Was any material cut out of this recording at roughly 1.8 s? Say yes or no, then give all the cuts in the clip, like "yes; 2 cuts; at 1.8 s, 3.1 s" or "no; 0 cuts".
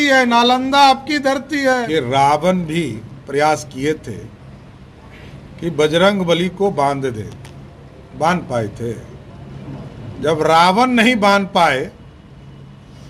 yes; 1 cut; at 1.8 s